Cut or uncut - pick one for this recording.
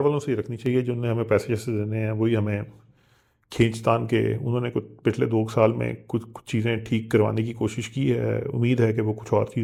uncut